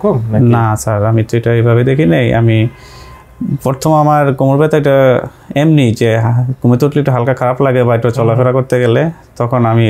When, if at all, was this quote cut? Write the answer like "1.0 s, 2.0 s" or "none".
none